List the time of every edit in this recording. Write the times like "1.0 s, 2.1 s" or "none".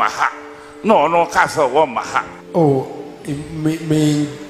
2.4 s

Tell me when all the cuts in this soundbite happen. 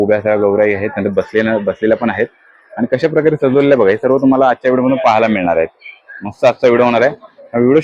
none

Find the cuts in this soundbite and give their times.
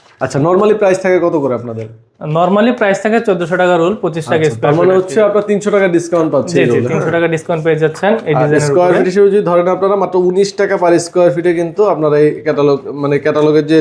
none

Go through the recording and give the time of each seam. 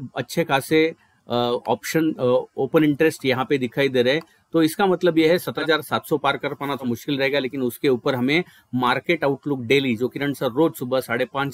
5.6 s, 6.8 s

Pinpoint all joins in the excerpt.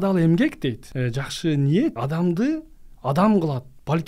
0.9 s, 2.0 s

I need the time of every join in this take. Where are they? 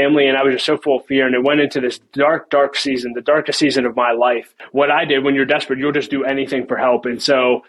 4.6 s

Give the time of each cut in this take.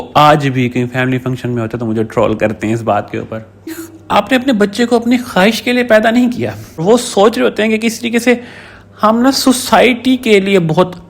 3.9 s, 6.8 s

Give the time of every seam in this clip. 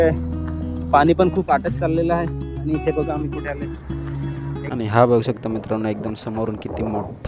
4.7 s

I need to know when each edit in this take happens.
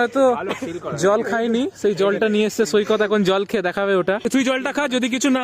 4.3 s

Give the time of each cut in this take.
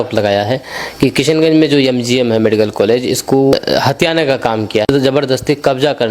3.5 s, 4.9 s

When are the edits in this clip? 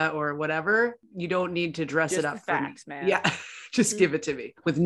1.1 s

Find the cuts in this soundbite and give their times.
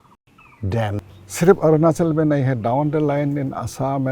1.0 s

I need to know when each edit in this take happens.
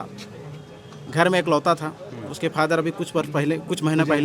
none

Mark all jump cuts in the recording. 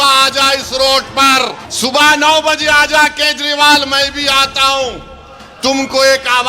1.6 s

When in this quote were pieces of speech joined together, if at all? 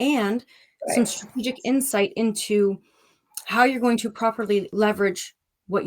4.7 s

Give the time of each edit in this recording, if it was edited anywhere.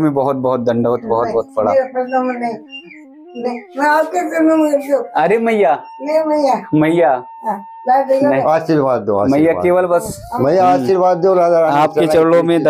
none

